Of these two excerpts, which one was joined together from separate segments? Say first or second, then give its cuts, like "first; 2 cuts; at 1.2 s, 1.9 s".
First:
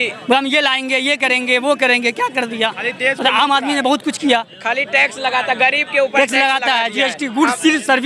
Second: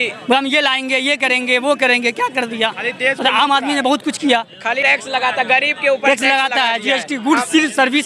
second; 1 cut; at 4.8 s